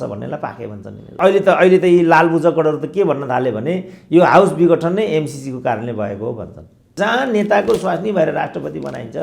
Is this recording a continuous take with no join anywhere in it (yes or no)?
no